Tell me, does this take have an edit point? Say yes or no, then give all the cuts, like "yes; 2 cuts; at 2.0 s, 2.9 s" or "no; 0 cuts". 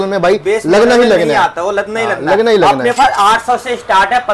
no; 0 cuts